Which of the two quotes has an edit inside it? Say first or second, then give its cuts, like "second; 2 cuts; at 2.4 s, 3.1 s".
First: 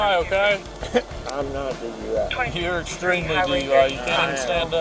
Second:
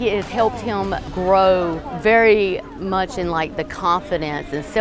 second; 2 cuts; at 1.1 s, 1.8 s